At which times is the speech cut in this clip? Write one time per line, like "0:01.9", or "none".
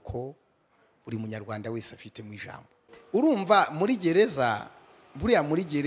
0:02.9